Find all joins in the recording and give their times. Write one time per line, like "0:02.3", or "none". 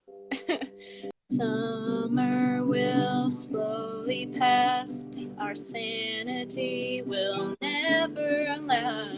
0:01.1